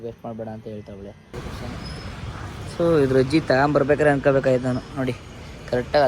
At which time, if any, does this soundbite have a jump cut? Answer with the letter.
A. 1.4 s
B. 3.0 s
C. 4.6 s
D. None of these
A